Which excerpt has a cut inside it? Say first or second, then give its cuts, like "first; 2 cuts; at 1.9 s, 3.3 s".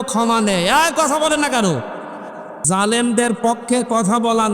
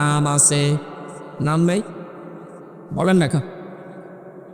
first; 1 cut; at 2.6 s